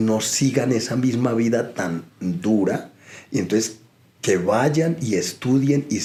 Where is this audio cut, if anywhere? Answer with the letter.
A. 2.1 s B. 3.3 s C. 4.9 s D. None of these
D